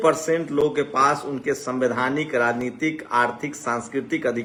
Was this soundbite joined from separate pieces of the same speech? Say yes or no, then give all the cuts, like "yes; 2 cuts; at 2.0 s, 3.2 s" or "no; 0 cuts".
no; 0 cuts